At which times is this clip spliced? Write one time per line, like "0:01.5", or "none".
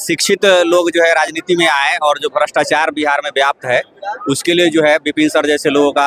none